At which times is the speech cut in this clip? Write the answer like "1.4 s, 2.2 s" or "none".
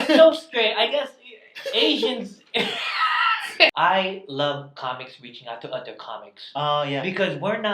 3.7 s